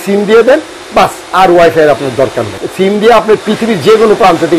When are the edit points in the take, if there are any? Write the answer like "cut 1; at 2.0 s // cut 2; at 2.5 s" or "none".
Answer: cut 1; at 2.6 s

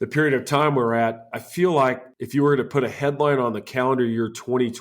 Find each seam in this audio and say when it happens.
cut 1; at 1.3 s // cut 2; at 2.1 s

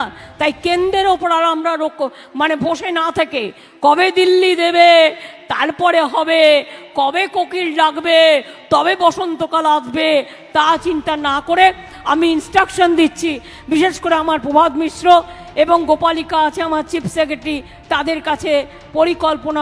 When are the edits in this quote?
none

